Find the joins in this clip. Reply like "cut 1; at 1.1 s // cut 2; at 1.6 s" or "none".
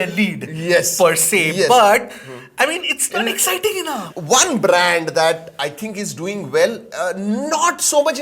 cut 1; at 4.0 s